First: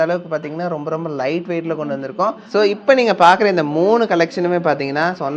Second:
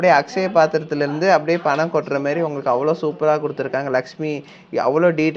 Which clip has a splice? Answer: first; 1 cut; at 2.4 s

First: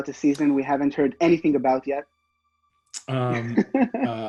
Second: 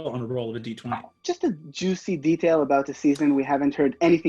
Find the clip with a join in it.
second; 1 cut; at 1.1 s

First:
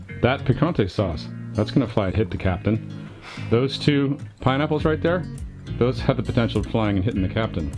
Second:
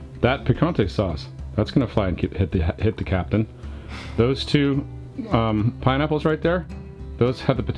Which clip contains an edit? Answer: first; 2 cuts; at 2.1 s, 4.3 s

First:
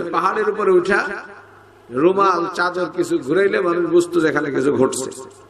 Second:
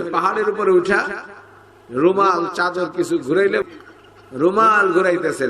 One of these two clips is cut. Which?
second; 1 cut; at 3.6 s

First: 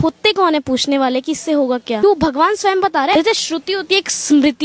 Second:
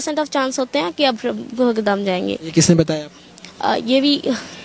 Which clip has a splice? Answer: first; 2 cuts; at 2.0 s, 3.1 s

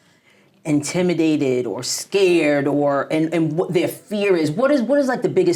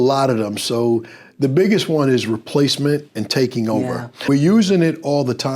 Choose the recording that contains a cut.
second; 1 cut; at 4.3 s

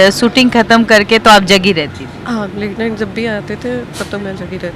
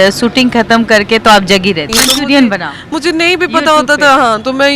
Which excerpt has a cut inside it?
second; 1 cut; at 1.9 s

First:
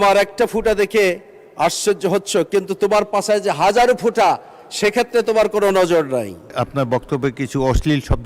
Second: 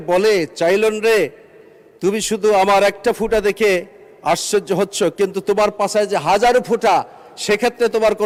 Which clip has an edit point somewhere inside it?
first; 1 cut; at 6.5 s

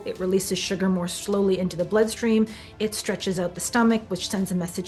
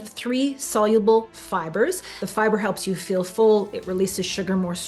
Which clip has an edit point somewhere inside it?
second; 1 cut; at 2.1 s

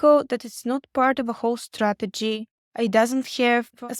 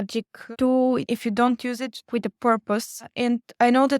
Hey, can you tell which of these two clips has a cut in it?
second; 2 cuts; at 1.0 s, 2.1 s

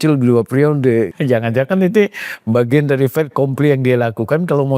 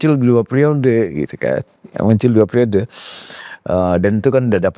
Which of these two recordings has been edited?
first; 1 cut; at 1.1 s

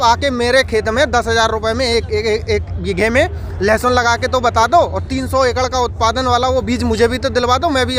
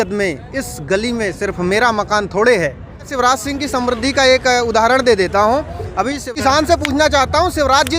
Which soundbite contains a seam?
second; 2 cuts; at 3.1 s, 6.3 s

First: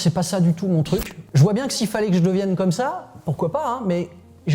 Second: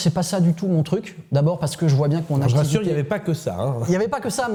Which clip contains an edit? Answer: first; 1 cut; at 1.2 s

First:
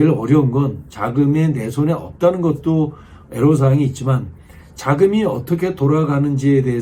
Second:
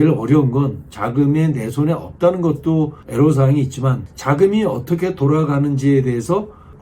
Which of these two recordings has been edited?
second; 2 cuts; at 3.0 s, 4.1 s

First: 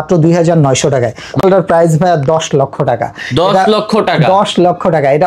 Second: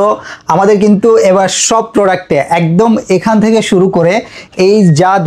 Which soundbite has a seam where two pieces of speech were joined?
first; 1 cut; at 1.4 s

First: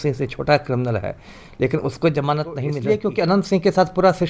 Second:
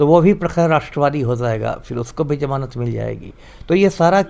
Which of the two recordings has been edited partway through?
first; 1 cut; at 2.7 s

